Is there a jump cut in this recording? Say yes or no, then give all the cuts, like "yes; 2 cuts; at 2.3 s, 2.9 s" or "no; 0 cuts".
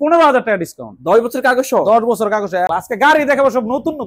yes; 1 cut; at 2.7 s